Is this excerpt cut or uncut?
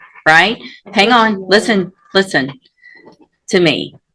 uncut